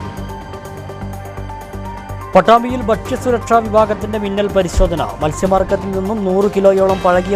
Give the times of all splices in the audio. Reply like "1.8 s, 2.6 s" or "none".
1.3 s